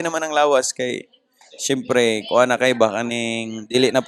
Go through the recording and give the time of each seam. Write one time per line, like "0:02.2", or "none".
none